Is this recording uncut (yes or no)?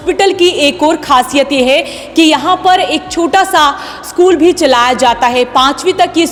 yes